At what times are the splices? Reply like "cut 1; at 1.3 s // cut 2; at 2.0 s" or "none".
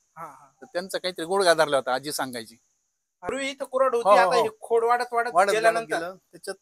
cut 1; at 3.3 s